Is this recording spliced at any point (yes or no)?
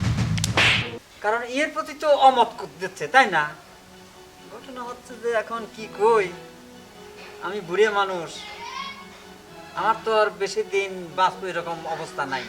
yes